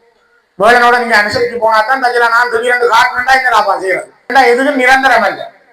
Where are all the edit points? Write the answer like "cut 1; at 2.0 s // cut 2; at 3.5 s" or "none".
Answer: cut 1; at 4.3 s

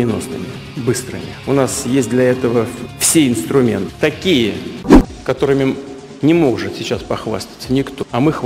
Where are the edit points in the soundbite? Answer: none

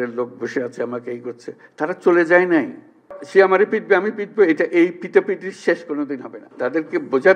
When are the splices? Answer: cut 1; at 3.2 s // cut 2; at 6.4 s

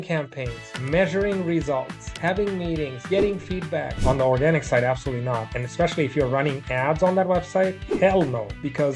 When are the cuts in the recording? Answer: cut 1; at 3.9 s

